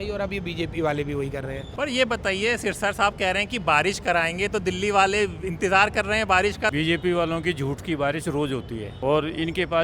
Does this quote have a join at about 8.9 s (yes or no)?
yes